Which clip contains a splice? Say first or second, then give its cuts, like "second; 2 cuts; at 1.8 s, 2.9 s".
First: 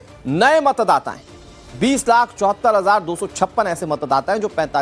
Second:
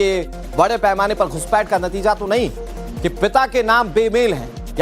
second; 1 cut; at 3.9 s